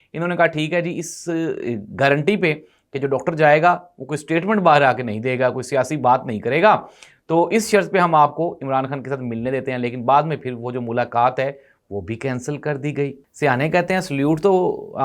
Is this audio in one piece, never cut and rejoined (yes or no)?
no